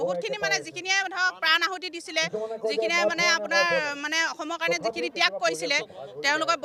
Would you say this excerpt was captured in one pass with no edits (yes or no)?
yes